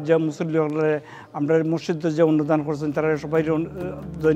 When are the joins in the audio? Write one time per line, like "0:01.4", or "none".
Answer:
none